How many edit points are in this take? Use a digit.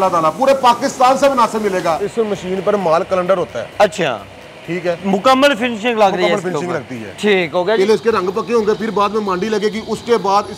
2